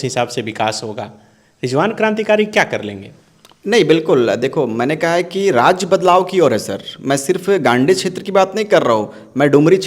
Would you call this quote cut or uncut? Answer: uncut